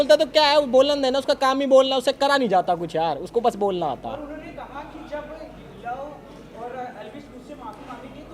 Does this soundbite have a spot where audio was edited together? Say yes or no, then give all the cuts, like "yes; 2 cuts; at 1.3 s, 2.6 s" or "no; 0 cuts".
no; 0 cuts